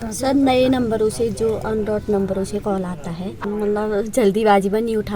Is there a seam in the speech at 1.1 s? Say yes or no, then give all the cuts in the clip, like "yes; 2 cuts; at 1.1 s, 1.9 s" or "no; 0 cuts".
no; 1 cut; at 3.3 s